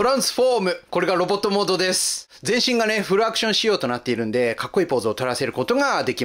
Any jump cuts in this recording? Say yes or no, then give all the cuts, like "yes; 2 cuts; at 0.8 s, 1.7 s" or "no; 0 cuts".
yes; 1 cut; at 2.2 s